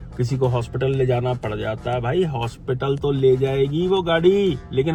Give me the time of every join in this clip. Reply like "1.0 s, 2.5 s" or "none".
none